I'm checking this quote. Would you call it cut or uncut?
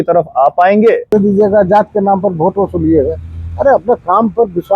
cut